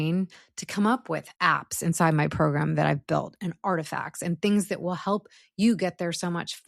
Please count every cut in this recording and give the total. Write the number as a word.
one